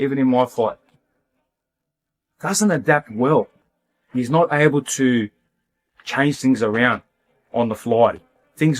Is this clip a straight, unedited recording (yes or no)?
yes